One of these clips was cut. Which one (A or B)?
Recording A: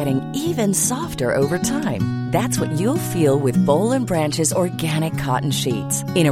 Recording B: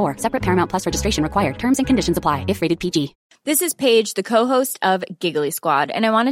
B